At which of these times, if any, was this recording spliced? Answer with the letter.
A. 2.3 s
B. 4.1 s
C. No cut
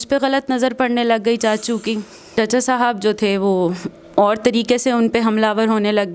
A